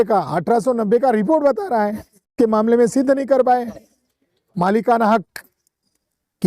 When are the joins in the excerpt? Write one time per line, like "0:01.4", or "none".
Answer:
0:02.3